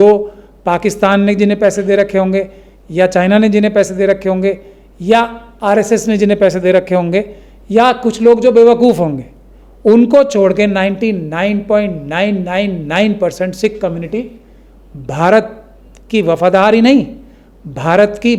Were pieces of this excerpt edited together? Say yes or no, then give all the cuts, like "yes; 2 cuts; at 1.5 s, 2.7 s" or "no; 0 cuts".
no; 0 cuts